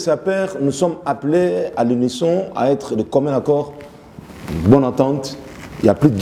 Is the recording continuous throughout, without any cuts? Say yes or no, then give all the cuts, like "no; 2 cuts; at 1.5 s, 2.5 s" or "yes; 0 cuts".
yes; 0 cuts